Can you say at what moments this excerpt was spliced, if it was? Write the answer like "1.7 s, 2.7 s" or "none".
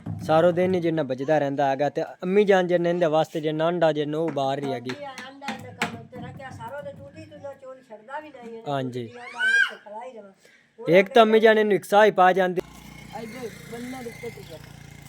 12.6 s